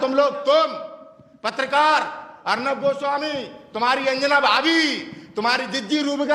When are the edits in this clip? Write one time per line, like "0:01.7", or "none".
none